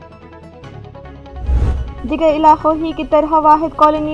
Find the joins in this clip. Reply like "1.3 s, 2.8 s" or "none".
none